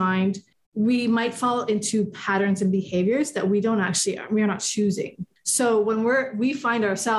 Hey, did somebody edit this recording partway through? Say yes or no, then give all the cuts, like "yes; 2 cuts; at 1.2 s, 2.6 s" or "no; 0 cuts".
no; 0 cuts